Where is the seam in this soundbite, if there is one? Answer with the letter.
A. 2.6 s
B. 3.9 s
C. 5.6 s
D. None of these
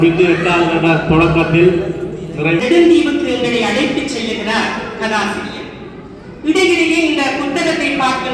A